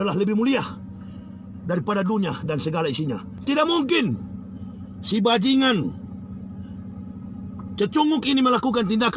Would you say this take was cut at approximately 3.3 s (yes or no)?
yes